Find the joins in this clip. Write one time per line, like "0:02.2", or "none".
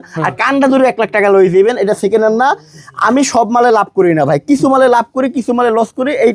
none